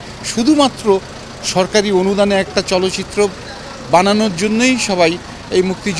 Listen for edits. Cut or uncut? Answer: uncut